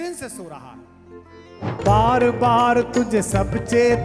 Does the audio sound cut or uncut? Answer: cut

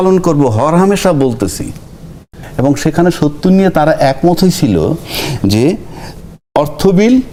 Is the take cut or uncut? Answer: uncut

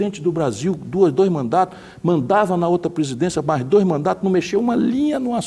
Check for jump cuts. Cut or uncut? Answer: uncut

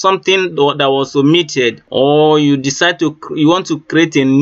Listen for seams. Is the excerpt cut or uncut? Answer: cut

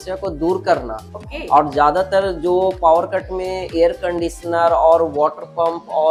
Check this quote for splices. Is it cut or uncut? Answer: uncut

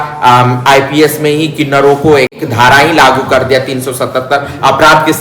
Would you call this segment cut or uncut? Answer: cut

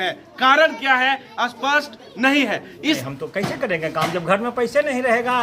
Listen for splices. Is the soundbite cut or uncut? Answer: cut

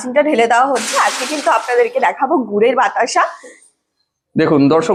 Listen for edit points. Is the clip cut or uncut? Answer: uncut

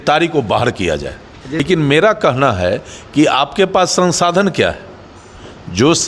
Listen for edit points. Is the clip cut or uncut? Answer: cut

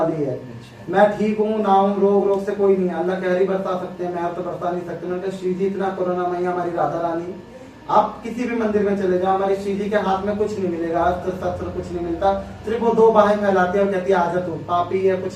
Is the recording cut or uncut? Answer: uncut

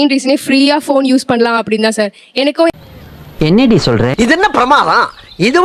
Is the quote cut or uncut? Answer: cut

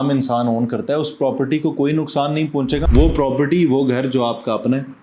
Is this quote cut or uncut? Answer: cut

